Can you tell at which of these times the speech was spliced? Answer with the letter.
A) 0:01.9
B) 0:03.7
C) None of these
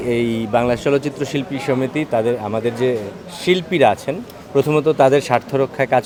C